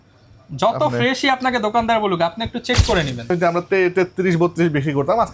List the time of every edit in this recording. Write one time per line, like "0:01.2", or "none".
0:03.3

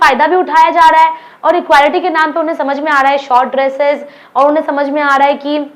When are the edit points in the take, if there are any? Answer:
none

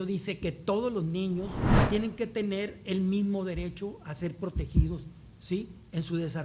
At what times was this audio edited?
0:01.7

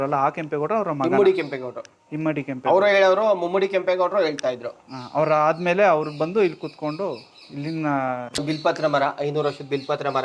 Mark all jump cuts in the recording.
0:08.4

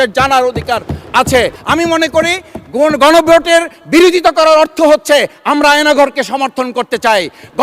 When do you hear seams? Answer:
0:01.6

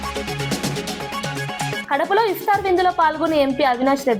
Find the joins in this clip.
0:01.8

